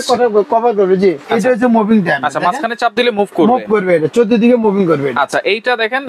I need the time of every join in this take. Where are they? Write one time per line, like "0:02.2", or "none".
0:01.2